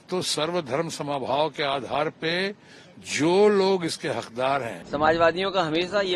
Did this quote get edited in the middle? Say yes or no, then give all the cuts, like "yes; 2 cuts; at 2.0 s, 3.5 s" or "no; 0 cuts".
yes; 1 cut; at 4.8 s